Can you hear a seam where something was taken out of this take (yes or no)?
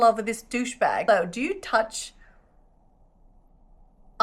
yes